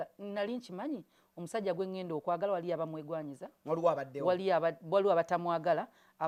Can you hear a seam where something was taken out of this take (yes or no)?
no